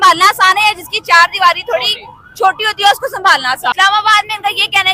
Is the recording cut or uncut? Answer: cut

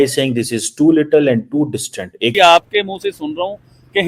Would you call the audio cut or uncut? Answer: cut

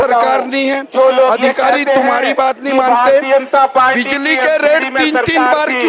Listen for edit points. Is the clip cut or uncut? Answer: uncut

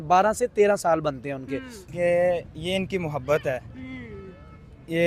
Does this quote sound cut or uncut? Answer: cut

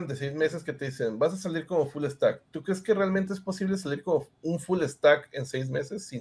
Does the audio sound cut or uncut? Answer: uncut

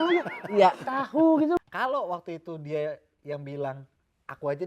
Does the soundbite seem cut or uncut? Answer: cut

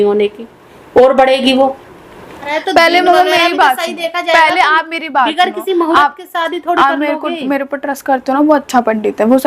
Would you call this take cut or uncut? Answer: cut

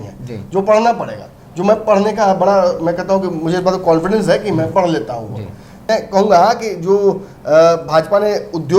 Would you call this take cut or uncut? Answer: cut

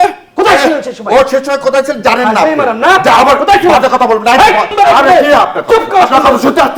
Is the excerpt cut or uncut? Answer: cut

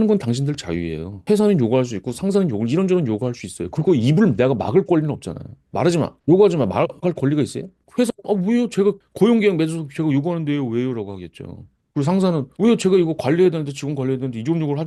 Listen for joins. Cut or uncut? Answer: uncut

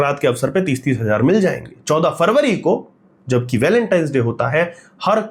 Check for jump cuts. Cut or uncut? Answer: uncut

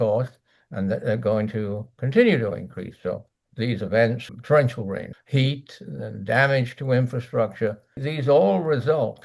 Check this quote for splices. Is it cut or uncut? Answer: cut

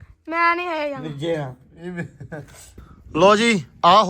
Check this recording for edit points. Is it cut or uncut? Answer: cut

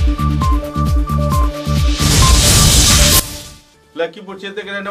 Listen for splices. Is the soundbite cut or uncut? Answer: uncut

